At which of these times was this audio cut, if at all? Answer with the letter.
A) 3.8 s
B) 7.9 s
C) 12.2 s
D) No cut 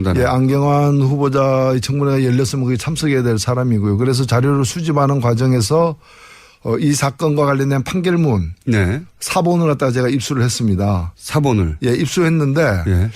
B